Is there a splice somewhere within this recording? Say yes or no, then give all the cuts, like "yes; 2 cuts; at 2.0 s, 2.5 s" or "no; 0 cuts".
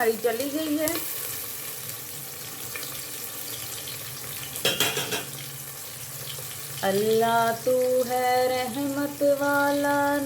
no; 0 cuts